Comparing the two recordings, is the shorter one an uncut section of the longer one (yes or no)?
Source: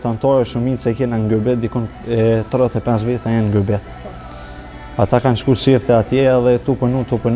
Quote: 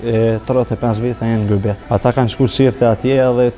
no